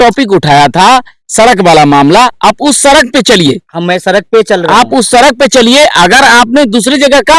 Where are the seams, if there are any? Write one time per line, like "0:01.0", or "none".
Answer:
none